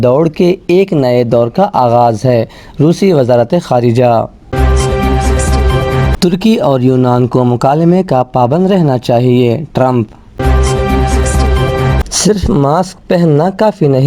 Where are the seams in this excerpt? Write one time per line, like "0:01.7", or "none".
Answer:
0:04.5
0:06.2
0:10.3
0:12.1